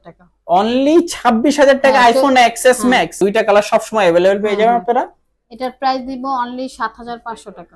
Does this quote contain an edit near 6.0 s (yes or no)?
no